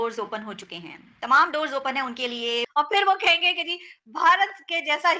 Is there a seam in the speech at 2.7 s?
yes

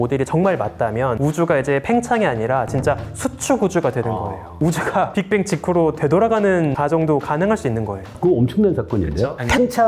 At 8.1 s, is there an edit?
yes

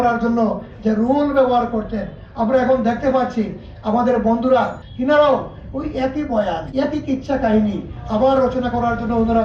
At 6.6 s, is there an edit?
yes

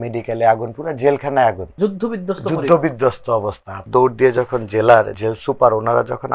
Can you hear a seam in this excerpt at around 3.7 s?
yes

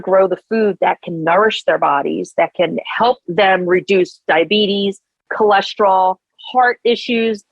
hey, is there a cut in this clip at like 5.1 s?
no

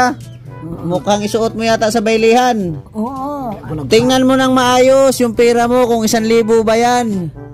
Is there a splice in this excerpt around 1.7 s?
no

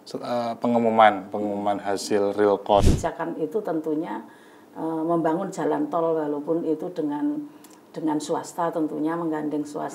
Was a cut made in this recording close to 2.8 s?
yes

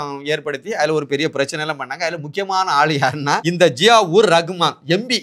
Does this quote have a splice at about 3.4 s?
yes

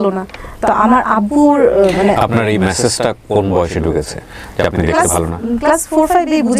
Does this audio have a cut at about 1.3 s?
no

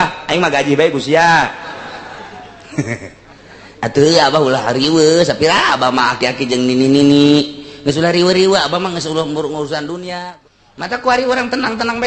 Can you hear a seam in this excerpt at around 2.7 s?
no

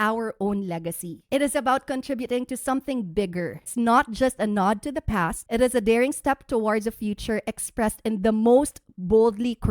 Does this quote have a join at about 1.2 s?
yes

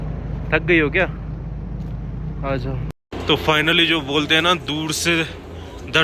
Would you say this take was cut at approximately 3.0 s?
yes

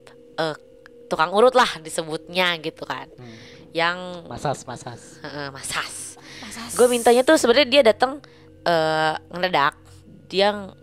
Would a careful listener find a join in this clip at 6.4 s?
no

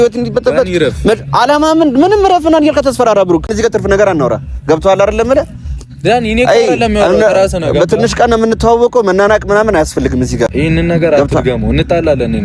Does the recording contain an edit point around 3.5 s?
yes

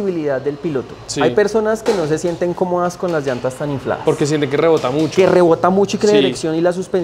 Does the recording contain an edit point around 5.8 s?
no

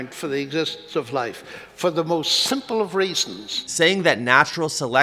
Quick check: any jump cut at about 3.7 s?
yes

